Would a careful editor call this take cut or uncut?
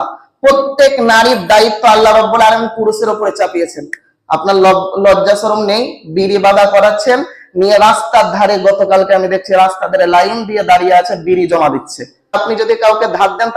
cut